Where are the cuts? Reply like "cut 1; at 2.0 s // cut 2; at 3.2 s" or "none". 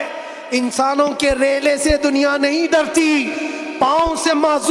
none